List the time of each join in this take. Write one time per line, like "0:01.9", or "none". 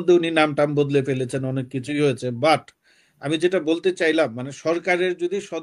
none